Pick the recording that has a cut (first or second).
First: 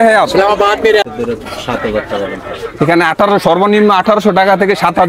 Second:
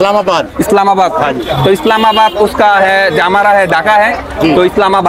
first